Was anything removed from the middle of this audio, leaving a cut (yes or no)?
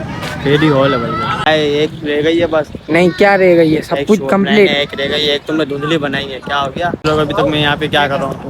yes